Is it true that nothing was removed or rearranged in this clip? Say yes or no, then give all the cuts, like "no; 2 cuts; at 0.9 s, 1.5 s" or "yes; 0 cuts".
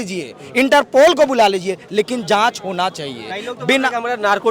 yes; 0 cuts